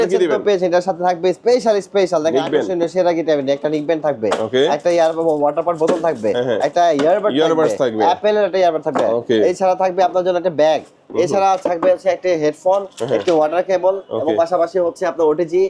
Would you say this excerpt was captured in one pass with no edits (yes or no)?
yes